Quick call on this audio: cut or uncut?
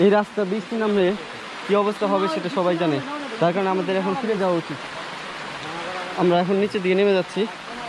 uncut